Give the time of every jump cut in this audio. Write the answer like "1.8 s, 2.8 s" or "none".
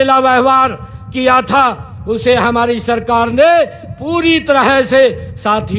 none